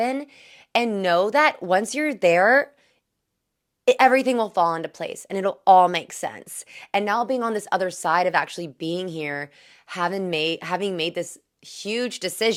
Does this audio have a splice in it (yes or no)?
no